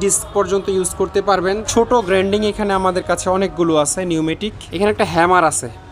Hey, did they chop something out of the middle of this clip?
yes; 2 cuts; at 1.7 s, 4.6 s

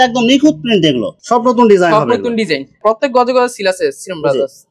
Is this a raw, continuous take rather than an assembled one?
no; 2 cuts; at 1.1 s, 2.8 s

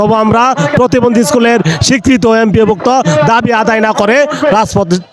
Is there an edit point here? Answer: no; 0 cuts

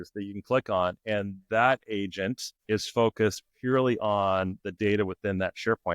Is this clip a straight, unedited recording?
no; 1 cut; at 2.5 s

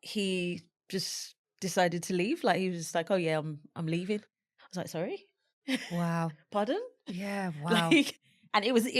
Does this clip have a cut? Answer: no; 0 cuts

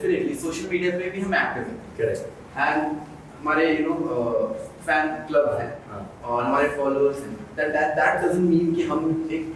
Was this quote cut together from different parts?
no; 0 cuts

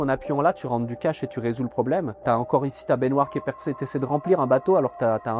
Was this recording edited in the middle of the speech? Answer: yes; 1 cut; at 2.2 s

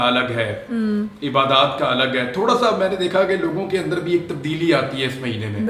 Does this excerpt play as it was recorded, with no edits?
yes; 0 cuts

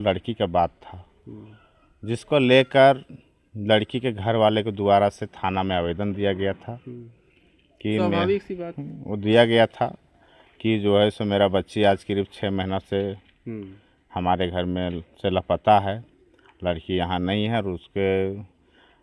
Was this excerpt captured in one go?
yes; 0 cuts

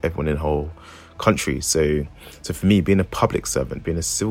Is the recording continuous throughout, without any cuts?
yes; 0 cuts

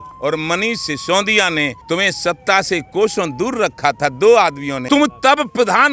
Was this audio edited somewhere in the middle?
no; 0 cuts

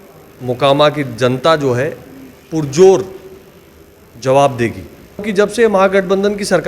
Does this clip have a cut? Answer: yes; 1 cut; at 5.3 s

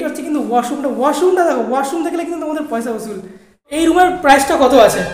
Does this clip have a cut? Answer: yes; 1 cut; at 3.7 s

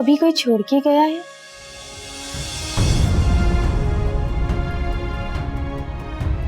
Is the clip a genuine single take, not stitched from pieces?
yes; 0 cuts

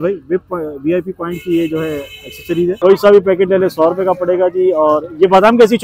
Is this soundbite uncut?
no; 1 cut; at 2.7 s

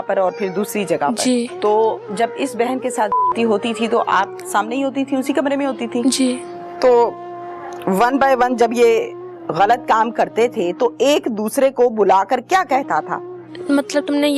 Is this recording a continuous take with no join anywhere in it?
no; 3 cuts; at 1.5 s, 6.7 s, 13.5 s

